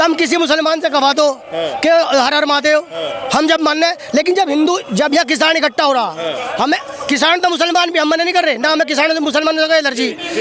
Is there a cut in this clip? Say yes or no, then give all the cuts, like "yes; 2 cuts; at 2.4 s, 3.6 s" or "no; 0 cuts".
no; 0 cuts